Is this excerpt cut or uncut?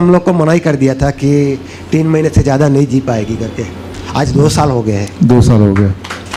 uncut